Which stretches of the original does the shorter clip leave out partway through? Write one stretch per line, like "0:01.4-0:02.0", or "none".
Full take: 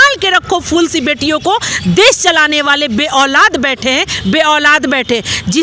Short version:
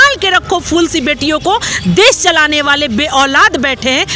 none